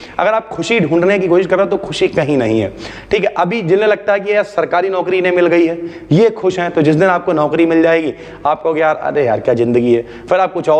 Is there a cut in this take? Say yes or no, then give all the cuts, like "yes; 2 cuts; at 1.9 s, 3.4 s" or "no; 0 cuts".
no; 0 cuts